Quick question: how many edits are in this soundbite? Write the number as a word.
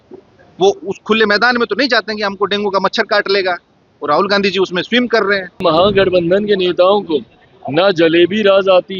one